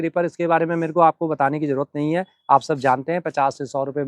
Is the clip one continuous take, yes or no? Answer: yes